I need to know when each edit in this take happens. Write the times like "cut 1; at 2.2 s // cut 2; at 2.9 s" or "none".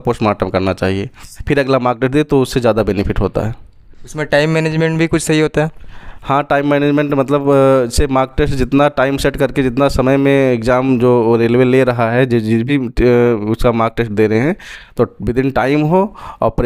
none